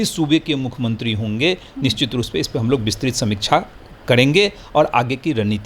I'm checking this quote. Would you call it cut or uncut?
uncut